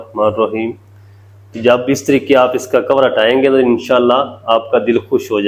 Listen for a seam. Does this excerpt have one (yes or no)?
no